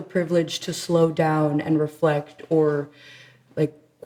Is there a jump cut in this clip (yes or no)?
no